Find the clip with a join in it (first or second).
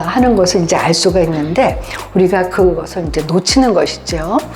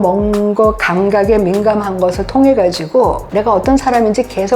second